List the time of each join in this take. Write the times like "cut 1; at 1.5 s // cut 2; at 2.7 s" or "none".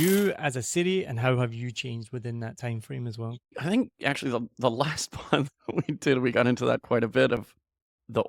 cut 1; at 3.6 s